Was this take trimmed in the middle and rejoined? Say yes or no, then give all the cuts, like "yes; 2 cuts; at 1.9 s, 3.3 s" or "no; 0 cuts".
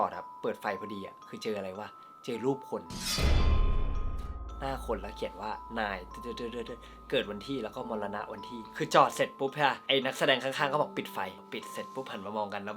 yes; 3 cuts; at 8.7 s, 9.8 s, 11.5 s